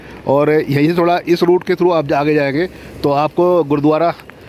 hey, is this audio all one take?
yes; 0 cuts

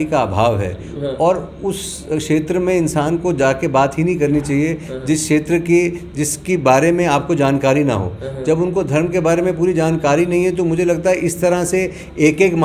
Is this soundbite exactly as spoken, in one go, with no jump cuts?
yes; 0 cuts

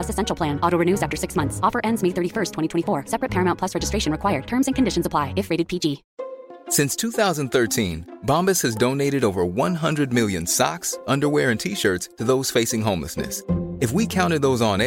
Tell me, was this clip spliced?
yes; 1 cut; at 6.1 s

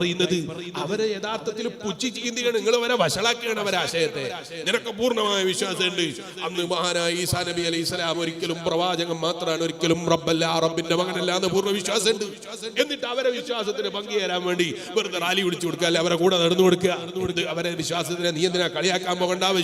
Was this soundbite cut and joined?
no; 0 cuts

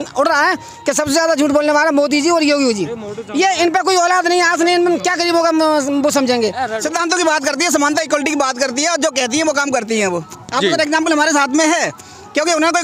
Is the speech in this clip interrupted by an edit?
yes; 1 cut; at 6.8 s

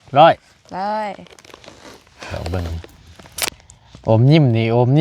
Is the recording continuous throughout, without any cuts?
no; 1 cut; at 2.3 s

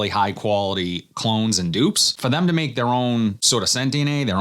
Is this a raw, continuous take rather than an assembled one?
no; 2 cuts; at 2.1 s, 3.4 s

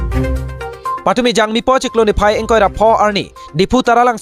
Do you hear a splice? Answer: no; 0 cuts

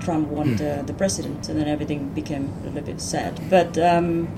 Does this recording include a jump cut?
yes; 2 cuts; at 1.4 s, 3.4 s

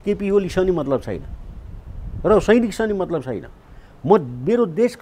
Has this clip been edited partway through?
no; 0 cuts

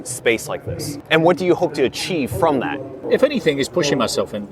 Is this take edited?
yes; 1 cut; at 3.0 s

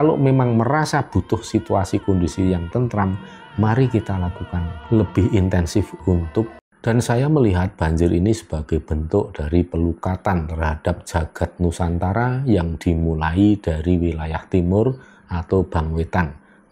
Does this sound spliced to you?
yes; 1 cut; at 6.7 s

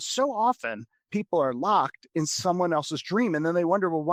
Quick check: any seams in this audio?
no; 0 cuts

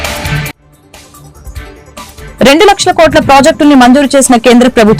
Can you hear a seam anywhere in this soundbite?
yes; 1 cut; at 2.3 s

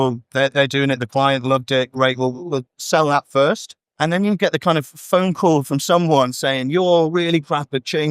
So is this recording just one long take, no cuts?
no; 1 cut; at 3.8 s

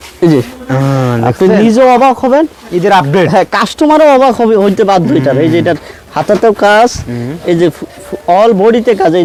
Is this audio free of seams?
yes; 0 cuts

